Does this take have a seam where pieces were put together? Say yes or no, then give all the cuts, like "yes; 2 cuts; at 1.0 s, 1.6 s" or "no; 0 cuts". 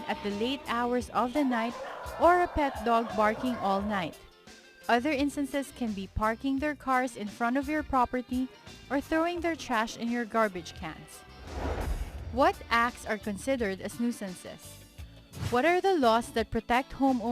yes; 1 cut; at 2.5 s